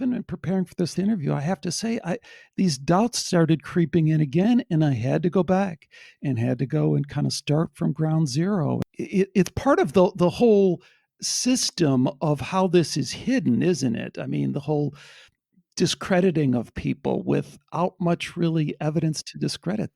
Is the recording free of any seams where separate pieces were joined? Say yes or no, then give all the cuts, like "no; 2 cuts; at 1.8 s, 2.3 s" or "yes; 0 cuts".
no; 2 cuts; at 0.9 s, 8.8 s